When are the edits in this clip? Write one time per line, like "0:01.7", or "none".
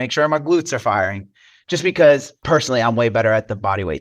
0:02.4